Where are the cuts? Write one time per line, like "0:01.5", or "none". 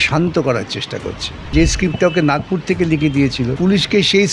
0:01.5
0:03.5